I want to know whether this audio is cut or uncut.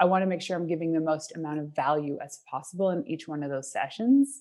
uncut